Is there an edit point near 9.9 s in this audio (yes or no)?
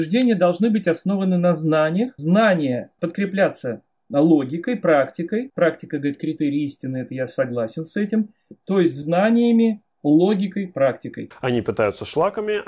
no